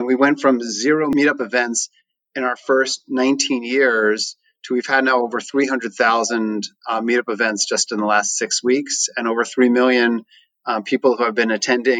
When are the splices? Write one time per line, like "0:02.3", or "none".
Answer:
0:01.1